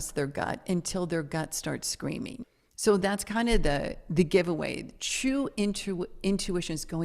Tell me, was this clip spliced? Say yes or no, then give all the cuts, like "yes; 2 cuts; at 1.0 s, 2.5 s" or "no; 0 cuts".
yes; 1 cut; at 2.4 s